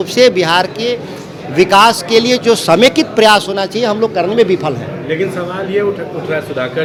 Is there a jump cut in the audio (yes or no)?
no